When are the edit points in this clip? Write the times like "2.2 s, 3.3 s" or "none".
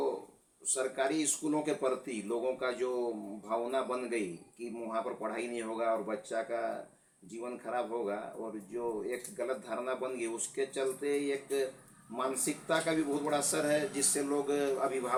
none